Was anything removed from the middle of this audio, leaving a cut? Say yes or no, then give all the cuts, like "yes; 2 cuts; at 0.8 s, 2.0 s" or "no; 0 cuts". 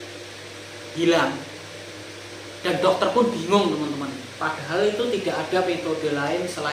no; 0 cuts